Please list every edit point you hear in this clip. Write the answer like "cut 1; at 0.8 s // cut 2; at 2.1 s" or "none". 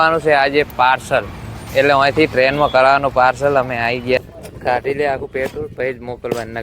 cut 1; at 4.2 s